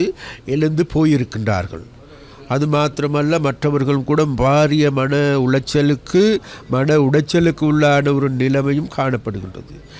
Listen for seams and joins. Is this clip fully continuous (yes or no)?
yes